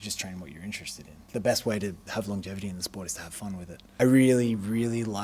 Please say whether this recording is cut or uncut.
cut